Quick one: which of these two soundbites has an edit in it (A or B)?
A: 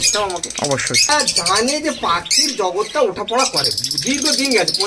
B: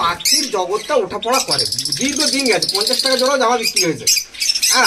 A